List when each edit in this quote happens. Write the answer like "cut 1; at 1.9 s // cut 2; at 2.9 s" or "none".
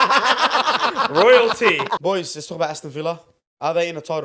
cut 1; at 2.0 s